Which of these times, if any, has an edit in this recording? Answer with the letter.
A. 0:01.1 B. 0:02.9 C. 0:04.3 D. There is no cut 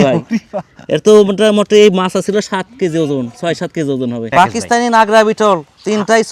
C